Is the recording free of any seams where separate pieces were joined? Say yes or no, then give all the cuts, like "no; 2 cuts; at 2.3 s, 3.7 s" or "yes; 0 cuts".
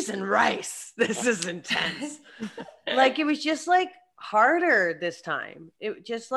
yes; 0 cuts